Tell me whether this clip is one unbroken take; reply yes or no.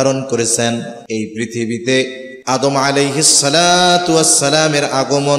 no